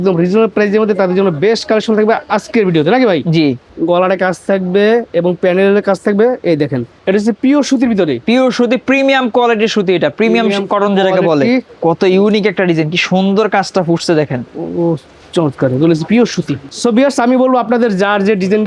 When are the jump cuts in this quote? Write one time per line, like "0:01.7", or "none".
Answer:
0:03.6
0:07.0
0:11.7
0:16.6